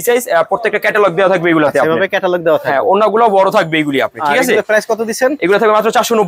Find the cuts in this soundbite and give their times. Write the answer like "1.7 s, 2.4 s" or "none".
none